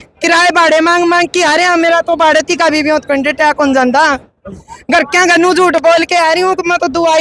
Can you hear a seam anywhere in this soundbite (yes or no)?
no